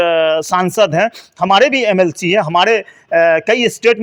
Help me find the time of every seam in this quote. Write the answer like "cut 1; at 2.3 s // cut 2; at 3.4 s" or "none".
none